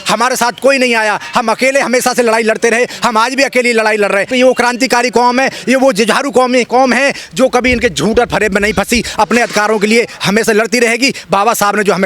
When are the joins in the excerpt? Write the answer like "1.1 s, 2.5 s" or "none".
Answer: 4.3 s